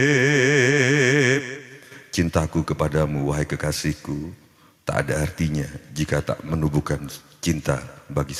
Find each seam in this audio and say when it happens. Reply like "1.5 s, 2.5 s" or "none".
none